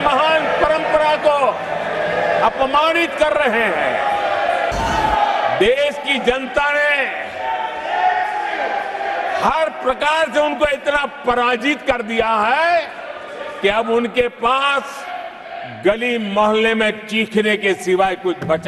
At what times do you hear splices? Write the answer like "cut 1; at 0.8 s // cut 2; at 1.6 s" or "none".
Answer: cut 1; at 4.7 s